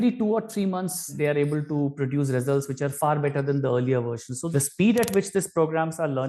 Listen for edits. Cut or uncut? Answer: cut